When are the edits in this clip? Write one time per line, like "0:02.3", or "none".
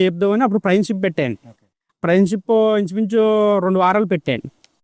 none